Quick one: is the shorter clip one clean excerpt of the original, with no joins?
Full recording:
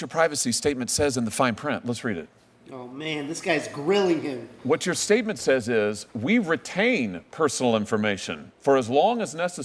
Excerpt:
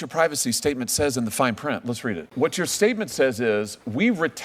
no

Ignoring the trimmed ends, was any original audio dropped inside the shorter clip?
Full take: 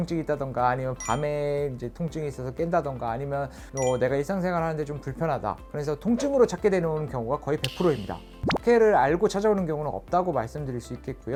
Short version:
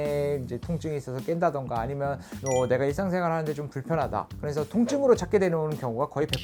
no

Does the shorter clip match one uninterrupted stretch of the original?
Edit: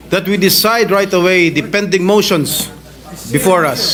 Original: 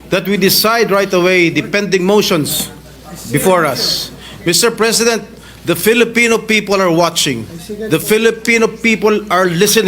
yes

